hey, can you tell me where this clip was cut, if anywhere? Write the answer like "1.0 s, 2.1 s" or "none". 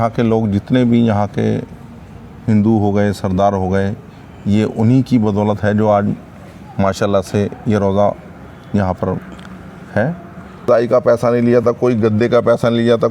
10.7 s